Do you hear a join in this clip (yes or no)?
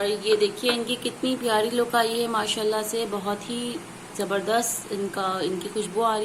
no